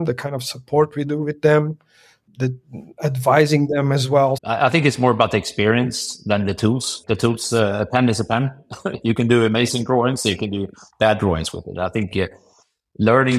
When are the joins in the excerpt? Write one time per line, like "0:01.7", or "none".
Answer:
0:02.2
0:04.4
0:07.0